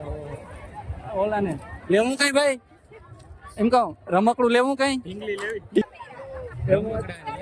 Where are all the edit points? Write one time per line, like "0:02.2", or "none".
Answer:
0:05.9